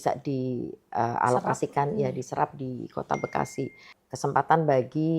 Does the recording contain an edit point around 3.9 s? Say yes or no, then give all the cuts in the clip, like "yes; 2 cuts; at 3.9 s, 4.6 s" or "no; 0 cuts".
yes; 1 cut; at 3.9 s